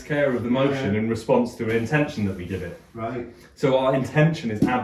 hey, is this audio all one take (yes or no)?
yes